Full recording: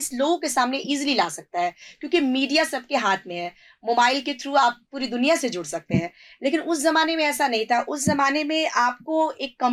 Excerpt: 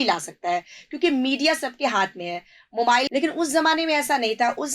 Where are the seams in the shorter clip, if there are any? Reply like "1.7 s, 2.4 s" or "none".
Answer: 3.1 s